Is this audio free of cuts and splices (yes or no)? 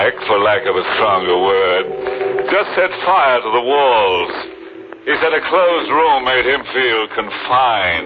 yes